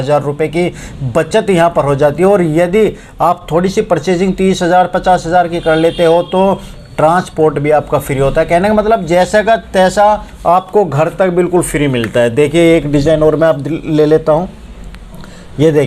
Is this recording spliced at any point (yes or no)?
no